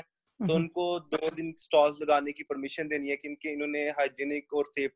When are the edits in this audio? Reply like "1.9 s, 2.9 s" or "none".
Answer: none